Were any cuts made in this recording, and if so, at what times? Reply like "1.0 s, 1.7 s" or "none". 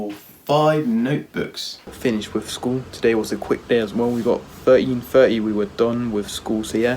1.9 s